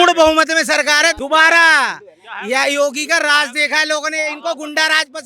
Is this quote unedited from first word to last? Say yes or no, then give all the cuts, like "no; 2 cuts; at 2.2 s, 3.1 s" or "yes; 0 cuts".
no; 1 cut; at 1.2 s